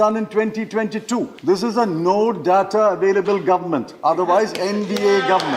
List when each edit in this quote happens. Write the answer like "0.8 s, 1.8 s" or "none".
1.3 s